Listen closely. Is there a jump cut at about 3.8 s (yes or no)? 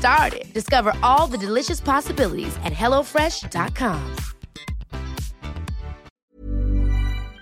no